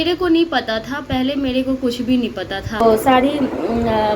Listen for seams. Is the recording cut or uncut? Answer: cut